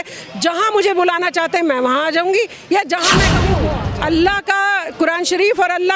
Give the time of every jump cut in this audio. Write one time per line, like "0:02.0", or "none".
0:03.5